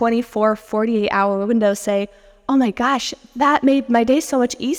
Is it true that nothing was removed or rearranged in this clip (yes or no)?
yes